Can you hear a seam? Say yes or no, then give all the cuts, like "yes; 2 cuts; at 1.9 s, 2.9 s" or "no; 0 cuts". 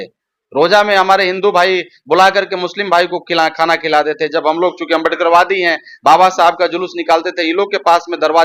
no; 0 cuts